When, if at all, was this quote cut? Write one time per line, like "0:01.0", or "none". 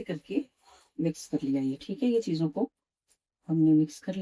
none